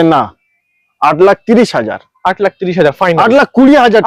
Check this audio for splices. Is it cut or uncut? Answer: uncut